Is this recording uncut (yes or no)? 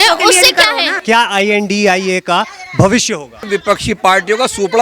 no